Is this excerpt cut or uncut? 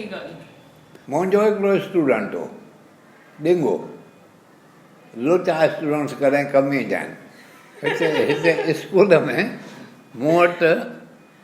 cut